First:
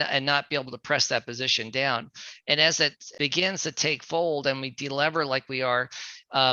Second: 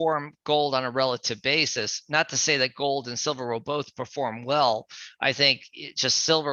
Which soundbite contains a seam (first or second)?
first